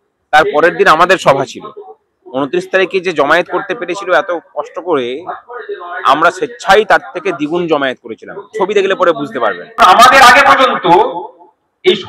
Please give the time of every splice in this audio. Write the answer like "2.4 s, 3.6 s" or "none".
9.8 s